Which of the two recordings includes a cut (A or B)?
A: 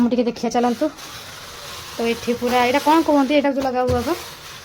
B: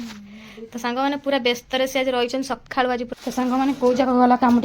B